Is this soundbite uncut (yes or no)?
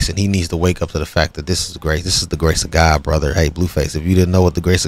yes